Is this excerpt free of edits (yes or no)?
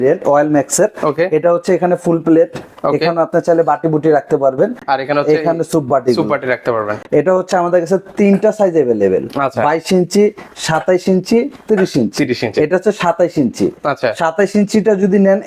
yes